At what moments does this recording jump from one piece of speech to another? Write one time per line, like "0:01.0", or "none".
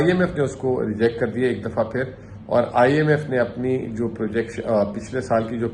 none